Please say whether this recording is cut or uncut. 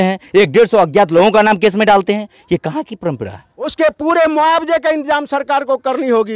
cut